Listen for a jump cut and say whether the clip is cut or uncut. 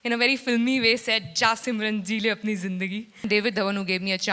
cut